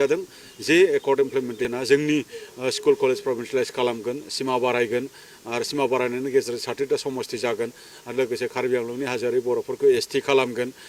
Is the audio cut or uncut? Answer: cut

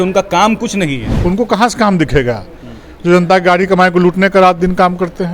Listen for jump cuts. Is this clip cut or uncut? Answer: cut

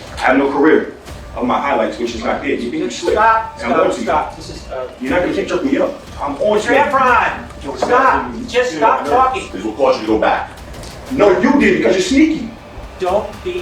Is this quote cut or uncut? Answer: cut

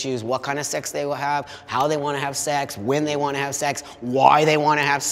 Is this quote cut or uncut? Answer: uncut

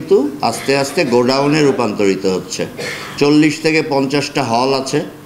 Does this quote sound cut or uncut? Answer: uncut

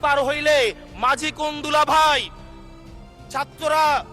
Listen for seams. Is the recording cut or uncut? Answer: uncut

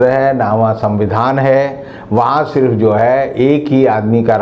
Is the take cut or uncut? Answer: uncut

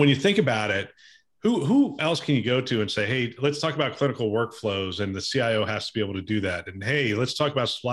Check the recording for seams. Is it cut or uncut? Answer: uncut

